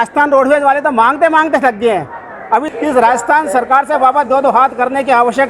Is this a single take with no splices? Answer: no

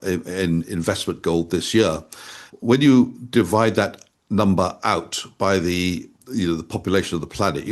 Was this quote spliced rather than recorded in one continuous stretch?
yes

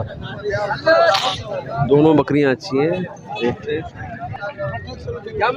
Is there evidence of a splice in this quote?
no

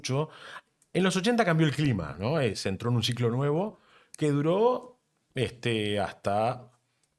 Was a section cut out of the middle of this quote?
no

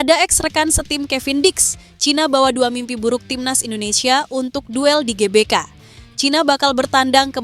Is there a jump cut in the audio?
no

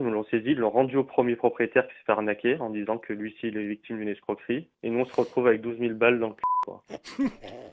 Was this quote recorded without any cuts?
yes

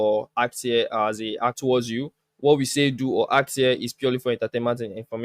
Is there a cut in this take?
yes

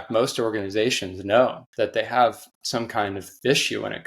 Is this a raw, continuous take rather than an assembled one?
no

